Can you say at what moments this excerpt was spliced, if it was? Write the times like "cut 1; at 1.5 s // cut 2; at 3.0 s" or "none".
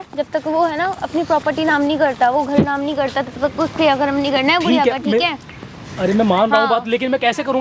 none